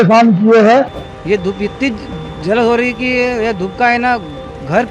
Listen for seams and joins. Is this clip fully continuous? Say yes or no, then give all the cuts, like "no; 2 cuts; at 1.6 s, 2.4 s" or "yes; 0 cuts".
no; 1 cut; at 1.0 s